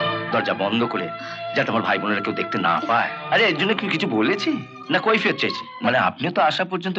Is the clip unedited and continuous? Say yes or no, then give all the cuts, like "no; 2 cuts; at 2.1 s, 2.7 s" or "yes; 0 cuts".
no; 2 cuts; at 3.2 s, 5.7 s